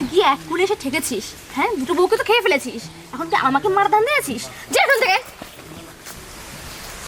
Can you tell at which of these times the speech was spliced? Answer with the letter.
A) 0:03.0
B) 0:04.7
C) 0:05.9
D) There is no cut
C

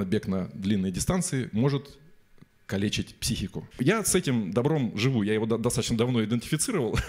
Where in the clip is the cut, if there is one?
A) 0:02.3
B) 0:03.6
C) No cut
B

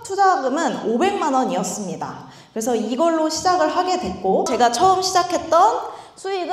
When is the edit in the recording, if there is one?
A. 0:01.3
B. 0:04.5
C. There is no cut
B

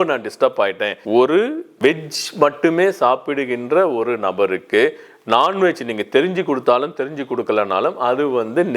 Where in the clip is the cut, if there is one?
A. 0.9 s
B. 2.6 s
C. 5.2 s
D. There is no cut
A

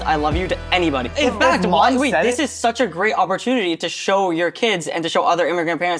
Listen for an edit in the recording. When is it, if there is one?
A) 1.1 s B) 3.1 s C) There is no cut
A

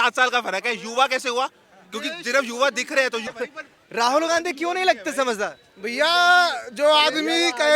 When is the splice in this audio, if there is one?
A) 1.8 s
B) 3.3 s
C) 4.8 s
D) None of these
B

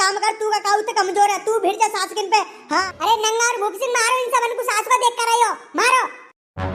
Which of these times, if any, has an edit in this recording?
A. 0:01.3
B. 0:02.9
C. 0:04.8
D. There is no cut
B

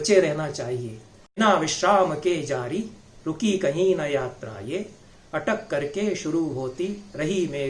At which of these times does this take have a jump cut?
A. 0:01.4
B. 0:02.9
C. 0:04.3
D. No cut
A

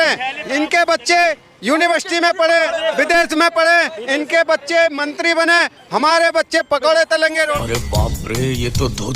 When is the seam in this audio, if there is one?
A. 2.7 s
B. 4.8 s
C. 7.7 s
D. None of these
C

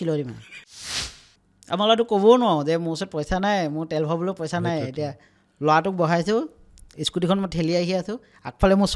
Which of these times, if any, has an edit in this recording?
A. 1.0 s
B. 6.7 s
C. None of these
A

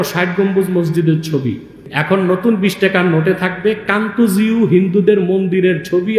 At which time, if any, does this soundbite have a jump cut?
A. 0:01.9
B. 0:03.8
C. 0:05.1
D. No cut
A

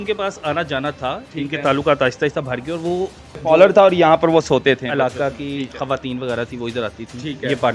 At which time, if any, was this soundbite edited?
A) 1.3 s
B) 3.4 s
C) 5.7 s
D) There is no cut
B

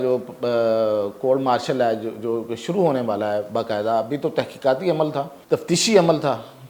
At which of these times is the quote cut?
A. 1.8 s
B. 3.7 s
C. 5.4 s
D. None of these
C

